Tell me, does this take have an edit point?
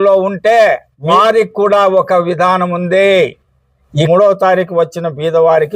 yes; 2 cuts; at 0.9 s, 4.1 s

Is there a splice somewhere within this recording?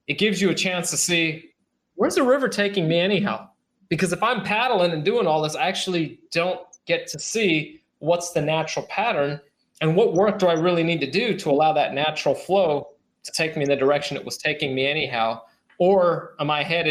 no; 0 cuts

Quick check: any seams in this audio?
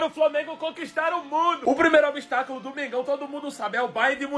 no; 0 cuts

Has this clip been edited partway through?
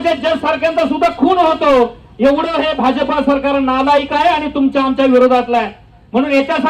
no; 0 cuts

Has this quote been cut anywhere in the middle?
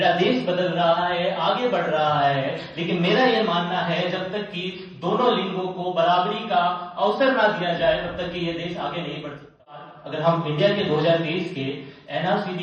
yes; 1 cut; at 9.9 s

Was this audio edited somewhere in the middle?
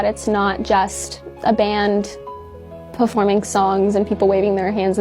no; 0 cuts

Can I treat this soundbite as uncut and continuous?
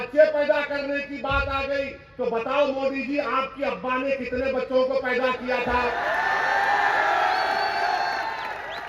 yes; 0 cuts

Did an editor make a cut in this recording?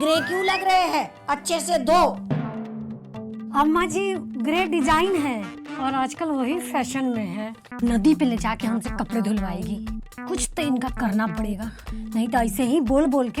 yes; 1 cut; at 7.6 s

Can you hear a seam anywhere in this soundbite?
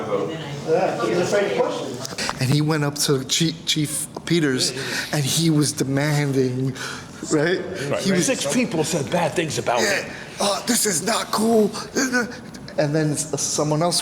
yes; 1 cut; at 2.2 s

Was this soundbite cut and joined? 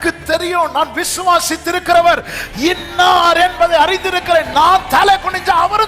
no; 0 cuts

